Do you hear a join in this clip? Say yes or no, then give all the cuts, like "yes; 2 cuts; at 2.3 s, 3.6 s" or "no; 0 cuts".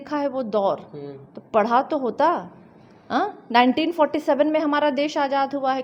no; 0 cuts